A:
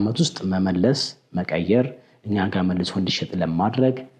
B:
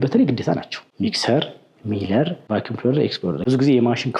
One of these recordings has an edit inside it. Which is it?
B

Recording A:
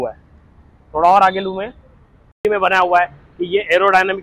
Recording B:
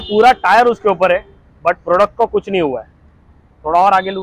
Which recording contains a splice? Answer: A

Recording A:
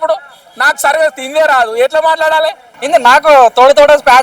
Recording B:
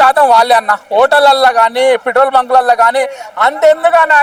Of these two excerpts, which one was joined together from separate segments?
A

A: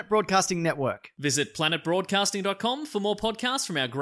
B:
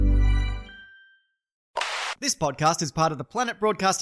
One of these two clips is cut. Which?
B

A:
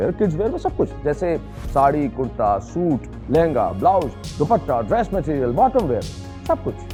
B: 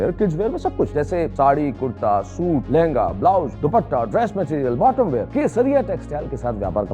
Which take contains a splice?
B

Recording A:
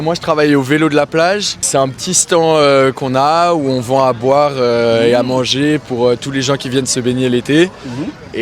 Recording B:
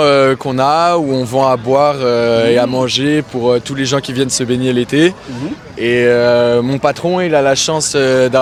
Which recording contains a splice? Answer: A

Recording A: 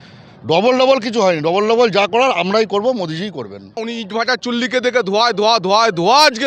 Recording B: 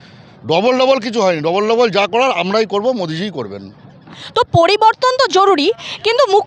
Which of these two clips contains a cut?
A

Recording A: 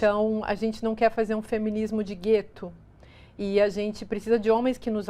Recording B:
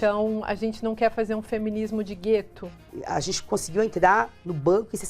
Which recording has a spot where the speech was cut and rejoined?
B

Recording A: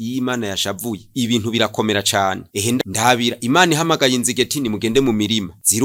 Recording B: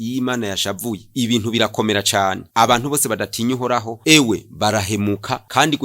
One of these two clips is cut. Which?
B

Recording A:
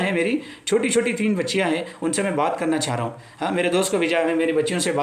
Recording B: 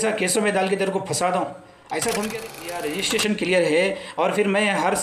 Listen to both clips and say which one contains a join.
B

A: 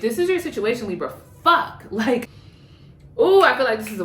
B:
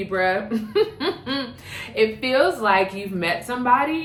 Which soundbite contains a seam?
A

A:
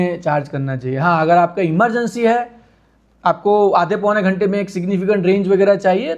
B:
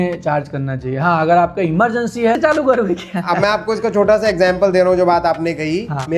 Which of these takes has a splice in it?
B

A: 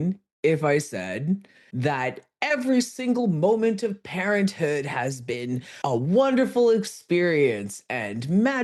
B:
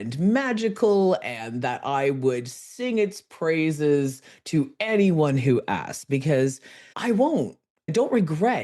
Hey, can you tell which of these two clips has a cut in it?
B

